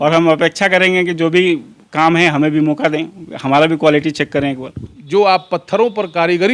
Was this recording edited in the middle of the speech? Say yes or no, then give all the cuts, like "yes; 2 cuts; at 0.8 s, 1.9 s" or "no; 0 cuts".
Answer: yes; 1 cut; at 4.9 s